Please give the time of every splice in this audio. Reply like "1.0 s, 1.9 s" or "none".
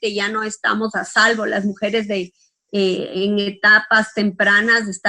none